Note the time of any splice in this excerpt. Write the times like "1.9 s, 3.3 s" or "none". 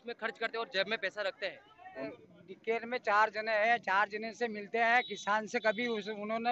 2.1 s

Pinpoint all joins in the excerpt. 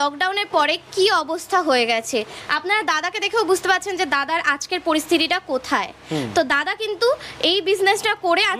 none

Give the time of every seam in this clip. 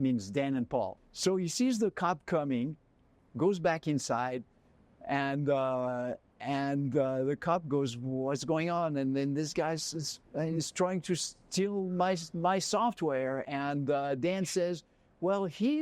1.0 s

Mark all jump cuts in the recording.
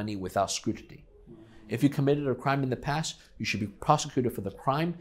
none

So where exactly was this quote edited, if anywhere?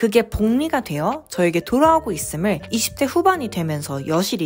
none

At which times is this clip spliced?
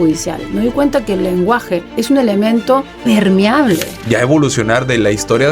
1.9 s, 2.9 s, 3.9 s

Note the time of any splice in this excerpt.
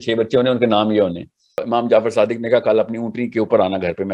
1.6 s

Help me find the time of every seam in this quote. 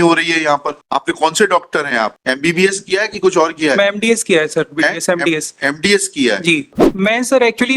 6.8 s

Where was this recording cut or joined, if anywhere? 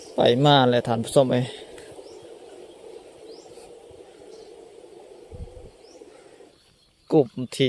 6.5 s

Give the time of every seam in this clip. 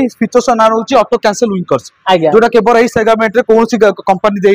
none

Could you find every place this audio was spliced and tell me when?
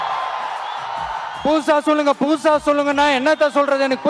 1.3 s

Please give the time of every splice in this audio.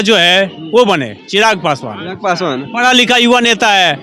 none

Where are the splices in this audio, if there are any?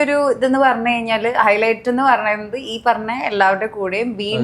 none

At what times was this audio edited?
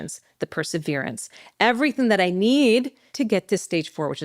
3.0 s

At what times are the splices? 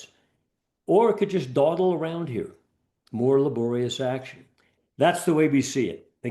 4.7 s

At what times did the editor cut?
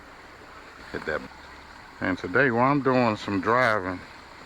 1.2 s

